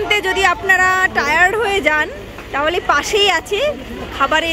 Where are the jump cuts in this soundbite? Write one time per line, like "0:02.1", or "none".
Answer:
none